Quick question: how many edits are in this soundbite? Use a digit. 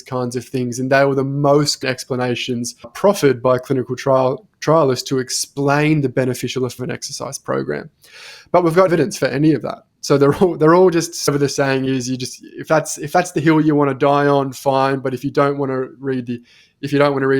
3